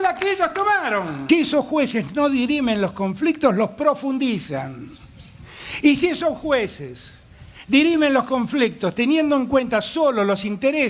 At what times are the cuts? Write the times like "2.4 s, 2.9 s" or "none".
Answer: 1.2 s